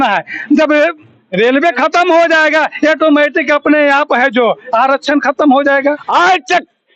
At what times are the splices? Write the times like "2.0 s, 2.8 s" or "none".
6.0 s